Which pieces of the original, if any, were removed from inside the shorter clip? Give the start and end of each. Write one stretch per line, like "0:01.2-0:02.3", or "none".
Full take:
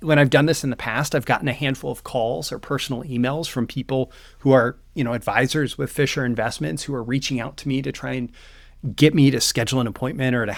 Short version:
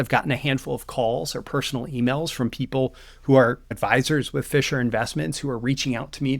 0:04.9-0:05.2